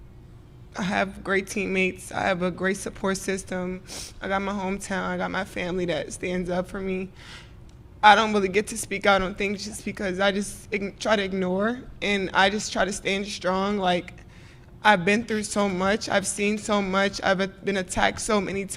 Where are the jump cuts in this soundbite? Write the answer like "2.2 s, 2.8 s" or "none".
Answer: none